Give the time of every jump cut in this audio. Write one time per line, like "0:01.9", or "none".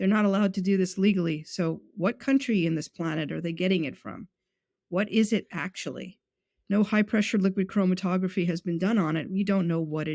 none